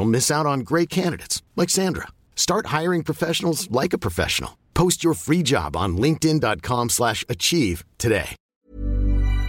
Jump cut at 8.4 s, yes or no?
yes